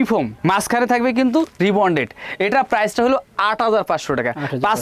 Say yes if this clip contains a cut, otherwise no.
no